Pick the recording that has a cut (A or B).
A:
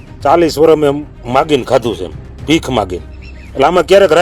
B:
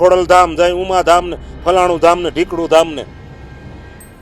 B